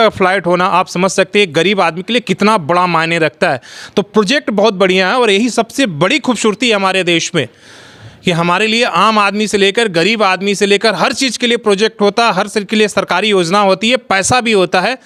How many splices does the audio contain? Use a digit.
0